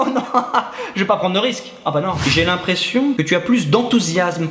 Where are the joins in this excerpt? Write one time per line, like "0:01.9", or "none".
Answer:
0:02.2
0:03.2